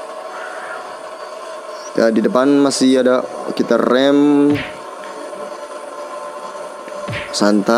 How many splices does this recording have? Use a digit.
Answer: 0